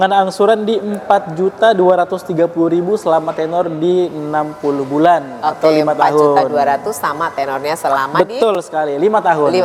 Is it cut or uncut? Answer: uncut